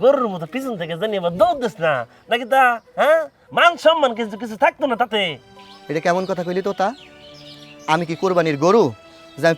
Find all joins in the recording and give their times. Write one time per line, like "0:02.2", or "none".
none